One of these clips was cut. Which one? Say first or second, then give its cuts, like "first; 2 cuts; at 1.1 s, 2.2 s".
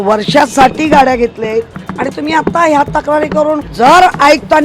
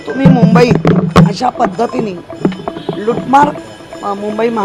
first; 2 cuts; at 1.8 s, 3.7 s